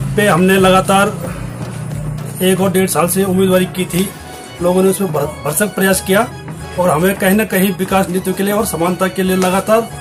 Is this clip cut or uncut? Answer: uncut